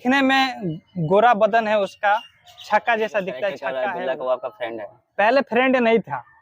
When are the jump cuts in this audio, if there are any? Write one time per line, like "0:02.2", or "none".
0:03.7